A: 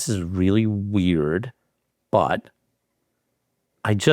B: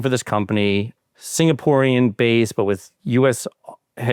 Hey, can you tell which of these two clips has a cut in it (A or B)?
B